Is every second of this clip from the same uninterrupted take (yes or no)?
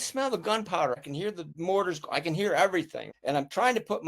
no